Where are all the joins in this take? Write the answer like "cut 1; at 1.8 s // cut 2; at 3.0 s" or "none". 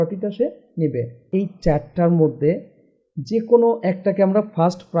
cut 1; at 1.3 s